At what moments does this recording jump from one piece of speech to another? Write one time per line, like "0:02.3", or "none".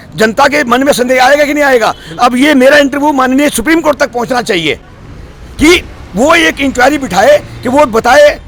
none